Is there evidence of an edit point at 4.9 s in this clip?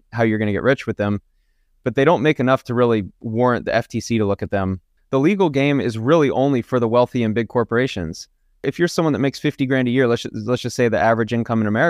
yes; 2 cuts; at 4.9 s, 8.6 s

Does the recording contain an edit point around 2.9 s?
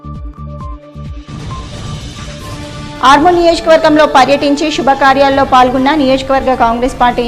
no; 1 cut; at 1.1 s

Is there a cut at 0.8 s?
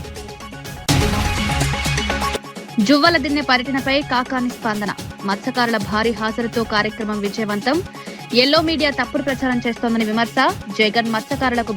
yes; 2 cuts; at 0.8 s, 2.4 s

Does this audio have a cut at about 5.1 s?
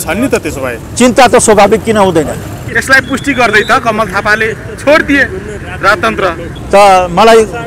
no; 2 cuts; at 2.7 s, 6.5 s

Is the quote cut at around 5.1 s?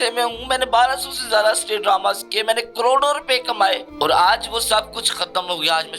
no; 1 cut; at 3.9 s

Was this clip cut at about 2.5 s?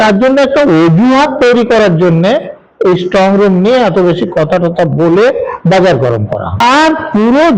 no; 1 cut; at 6.6 s

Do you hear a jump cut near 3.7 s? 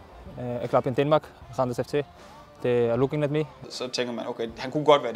yes; 1 cut; at 3.7 s

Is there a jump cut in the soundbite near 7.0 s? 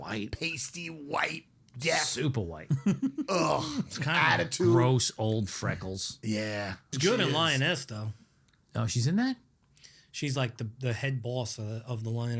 yes; 1 cut; at 7.0 s

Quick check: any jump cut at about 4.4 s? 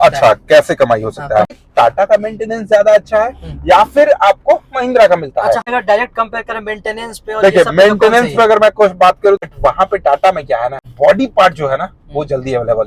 no; 4 cuts; at 1.5 s, 5.6 s, 9.4 s, 10.9 s

